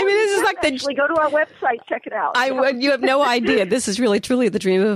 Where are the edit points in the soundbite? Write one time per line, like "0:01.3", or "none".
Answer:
none